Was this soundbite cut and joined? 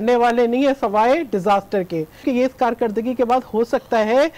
yes; 1 cut; at 2.1 s

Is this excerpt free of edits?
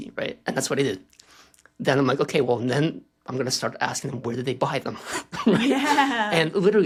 yes; 0 cuts

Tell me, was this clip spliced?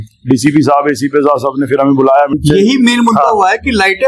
yes; 1 cut; at 2.4 s

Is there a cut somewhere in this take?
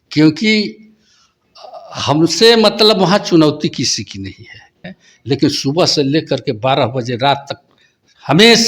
yes; 1 cut; at 4.7 s

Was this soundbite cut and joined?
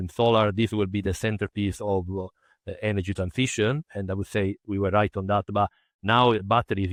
no; 0 cuts

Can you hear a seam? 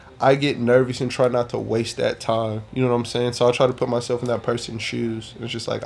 no; 0 cuts

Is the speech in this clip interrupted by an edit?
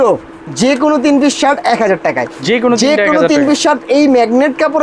no; 0 cuts

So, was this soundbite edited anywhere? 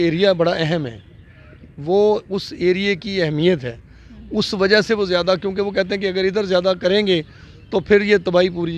no; 0 cuts

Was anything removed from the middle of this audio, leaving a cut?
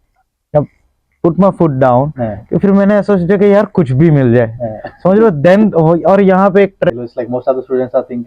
yes; 1 cut; at 6.9 s

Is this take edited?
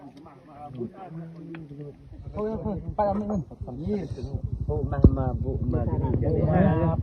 yes; 1 cut; at 2.1 s

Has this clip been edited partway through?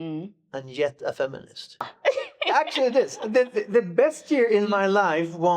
yes; 1 cut; at 1.9 s

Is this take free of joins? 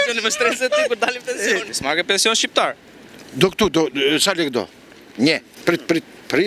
no; 2 cuts; at 1.7 s, 5.5 s

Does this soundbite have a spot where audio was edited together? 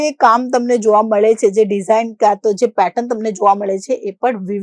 no; 0 cuts

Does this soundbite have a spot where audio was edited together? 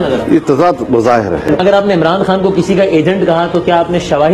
yes; 1 cut; at 1.6 s

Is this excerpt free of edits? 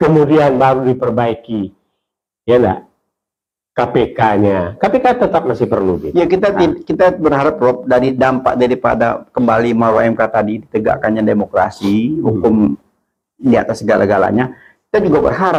yes; 0 cuts

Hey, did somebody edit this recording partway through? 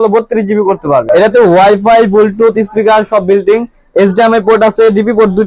yes; 1 cut; at 1.0 s

